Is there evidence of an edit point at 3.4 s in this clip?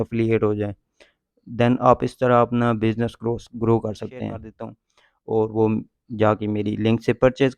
no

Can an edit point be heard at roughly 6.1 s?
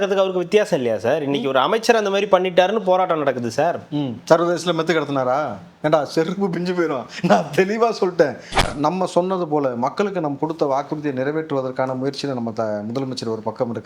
no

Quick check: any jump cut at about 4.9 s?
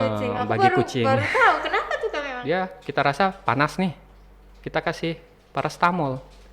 no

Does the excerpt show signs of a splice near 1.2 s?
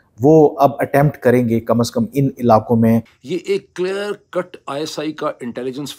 no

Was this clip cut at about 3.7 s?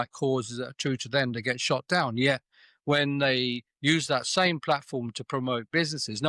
no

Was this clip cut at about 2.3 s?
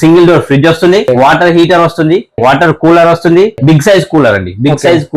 yes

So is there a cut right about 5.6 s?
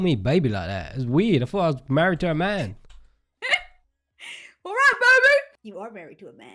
yes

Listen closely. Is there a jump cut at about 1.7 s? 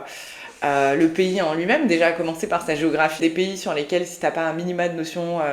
no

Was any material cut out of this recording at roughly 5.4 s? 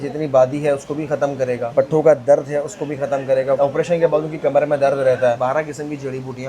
yes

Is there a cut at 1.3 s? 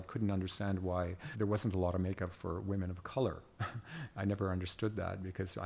yes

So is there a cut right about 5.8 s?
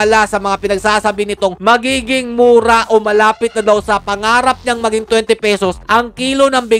yes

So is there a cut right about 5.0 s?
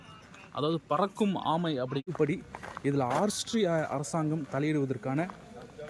no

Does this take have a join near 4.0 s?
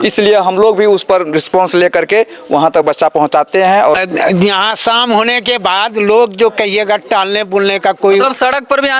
yes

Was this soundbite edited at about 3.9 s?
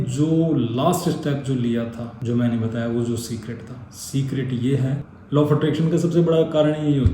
no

